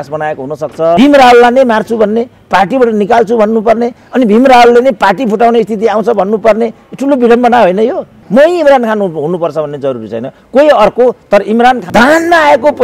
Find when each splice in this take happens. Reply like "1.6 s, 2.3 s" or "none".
1.0 s, 8.1 s, 11.8 s